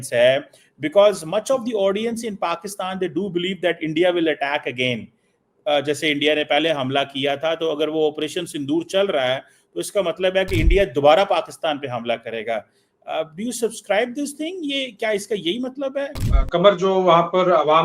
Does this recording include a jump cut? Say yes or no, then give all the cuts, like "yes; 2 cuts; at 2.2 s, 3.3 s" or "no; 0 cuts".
yes; 1 cut; at 16.2 s